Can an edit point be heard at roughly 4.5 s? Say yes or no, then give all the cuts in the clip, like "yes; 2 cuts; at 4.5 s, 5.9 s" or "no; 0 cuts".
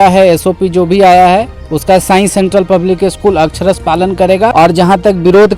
yes; 1 cut; at 4.5 s